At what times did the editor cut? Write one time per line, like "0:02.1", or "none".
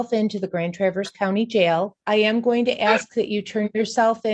0:02.0